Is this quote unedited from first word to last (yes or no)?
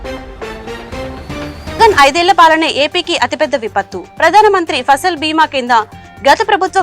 no